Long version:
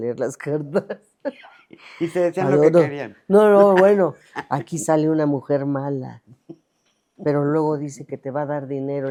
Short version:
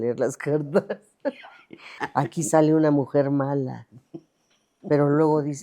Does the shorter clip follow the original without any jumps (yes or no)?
no